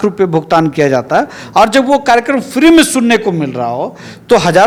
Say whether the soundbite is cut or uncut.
uncut